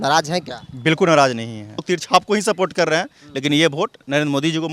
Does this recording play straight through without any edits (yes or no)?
no